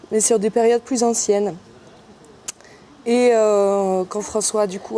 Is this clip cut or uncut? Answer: cut